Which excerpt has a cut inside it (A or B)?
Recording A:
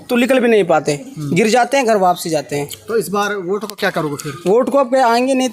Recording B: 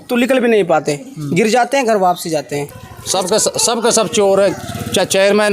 B